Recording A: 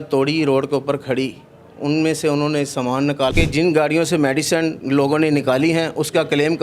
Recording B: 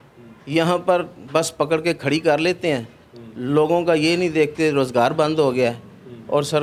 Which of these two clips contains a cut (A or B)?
A